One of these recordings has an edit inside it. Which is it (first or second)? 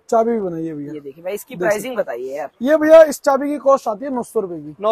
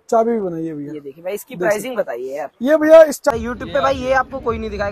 second